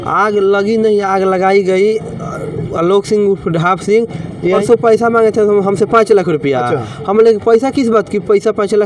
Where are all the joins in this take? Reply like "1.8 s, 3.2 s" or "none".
4.6 s